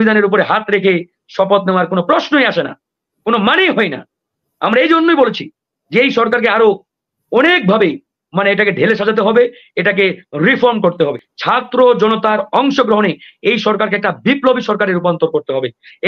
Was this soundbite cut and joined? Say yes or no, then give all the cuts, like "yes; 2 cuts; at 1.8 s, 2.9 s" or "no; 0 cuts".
yes; 1 cut; at 11.3 s